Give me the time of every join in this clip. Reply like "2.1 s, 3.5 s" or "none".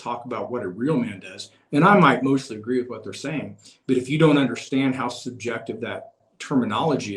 6.2 s